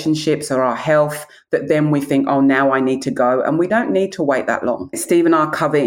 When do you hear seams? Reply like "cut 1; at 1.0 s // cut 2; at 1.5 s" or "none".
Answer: cut 1; at 3.7 s // cut 2; at 5.0 s